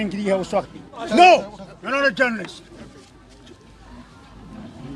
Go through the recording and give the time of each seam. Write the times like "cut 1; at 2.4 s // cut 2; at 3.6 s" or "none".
cut 1; at 1.0 s